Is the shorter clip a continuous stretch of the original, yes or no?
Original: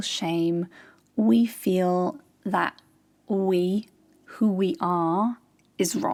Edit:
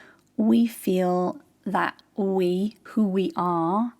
no